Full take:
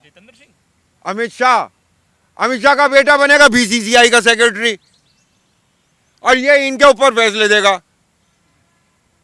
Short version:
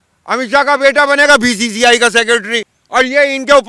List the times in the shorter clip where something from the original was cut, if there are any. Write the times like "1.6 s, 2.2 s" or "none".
2.7 s

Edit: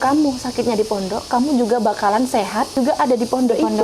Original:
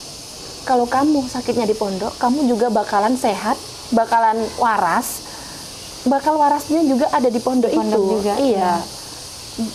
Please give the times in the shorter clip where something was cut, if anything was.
2.8 s

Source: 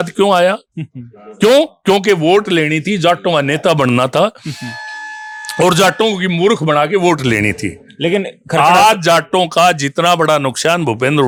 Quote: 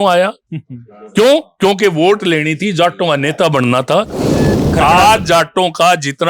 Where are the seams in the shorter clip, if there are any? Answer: 4.6 s

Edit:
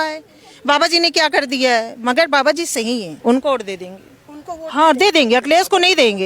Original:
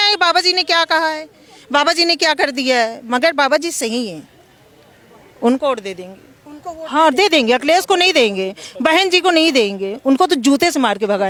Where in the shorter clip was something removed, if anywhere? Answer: 3.1 s

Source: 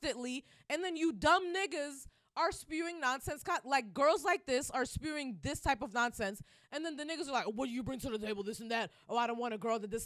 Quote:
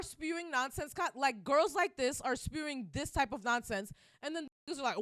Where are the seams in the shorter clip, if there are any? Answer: none

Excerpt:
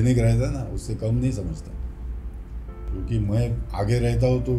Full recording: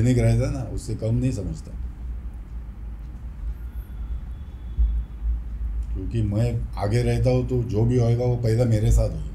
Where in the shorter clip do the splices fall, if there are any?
2.8 s

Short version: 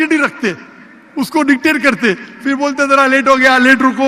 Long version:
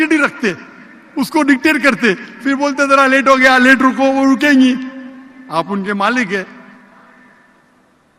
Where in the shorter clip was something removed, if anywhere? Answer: none

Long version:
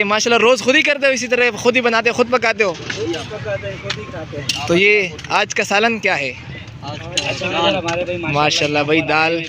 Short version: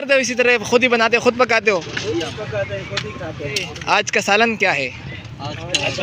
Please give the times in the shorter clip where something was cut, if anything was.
3.7 s

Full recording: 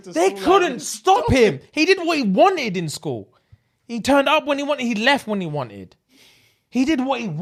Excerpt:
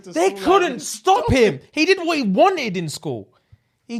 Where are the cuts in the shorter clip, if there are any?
none

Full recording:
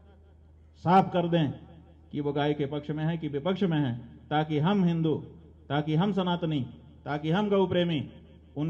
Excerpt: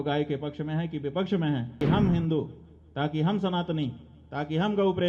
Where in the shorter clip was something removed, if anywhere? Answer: 1.8 s

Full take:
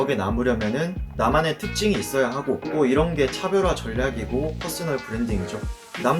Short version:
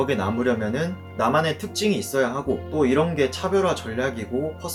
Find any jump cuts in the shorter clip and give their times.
none

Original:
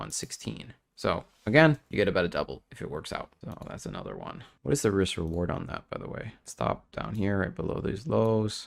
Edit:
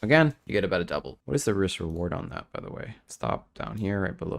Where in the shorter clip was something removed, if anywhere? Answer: 1.2 s

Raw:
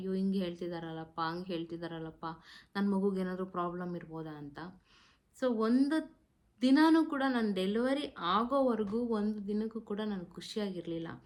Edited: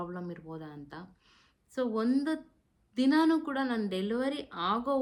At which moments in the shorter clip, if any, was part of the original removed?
none

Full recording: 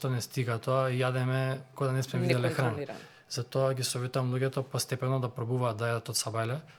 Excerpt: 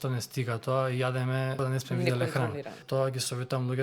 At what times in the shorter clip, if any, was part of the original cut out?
1.5 s, 2.8 s

